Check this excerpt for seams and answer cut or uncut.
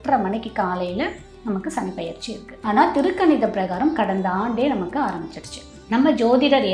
cut